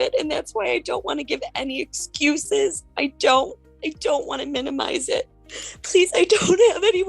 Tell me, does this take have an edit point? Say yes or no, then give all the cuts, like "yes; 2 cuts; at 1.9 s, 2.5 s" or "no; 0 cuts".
yes; 1 cut; at 5.4 s